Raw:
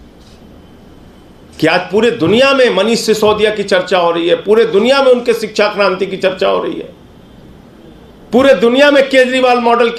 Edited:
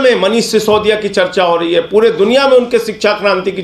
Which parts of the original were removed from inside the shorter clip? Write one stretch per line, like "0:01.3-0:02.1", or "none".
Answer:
none